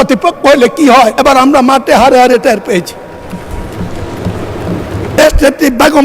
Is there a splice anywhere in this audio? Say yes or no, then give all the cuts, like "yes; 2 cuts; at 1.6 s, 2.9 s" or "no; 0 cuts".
yes; 2 cuts; at 1.2 s, 5.1 s